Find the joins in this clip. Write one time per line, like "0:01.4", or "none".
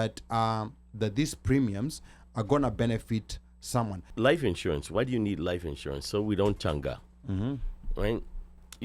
0:04.0